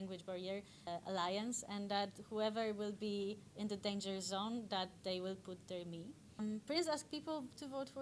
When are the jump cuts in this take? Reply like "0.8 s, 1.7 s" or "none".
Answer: 0.9 s, 6.4 s